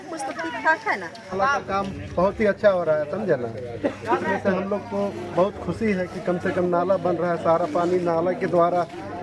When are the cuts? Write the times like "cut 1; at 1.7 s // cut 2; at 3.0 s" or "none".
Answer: cut 1; at 1.3 s